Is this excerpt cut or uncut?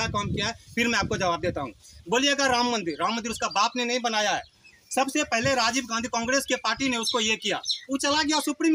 uncut